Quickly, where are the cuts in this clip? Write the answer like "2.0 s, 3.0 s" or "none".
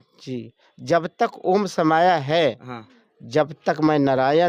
none